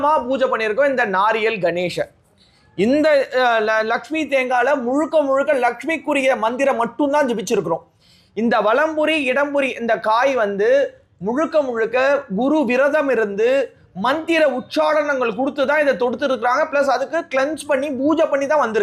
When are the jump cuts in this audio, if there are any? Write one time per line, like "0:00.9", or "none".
none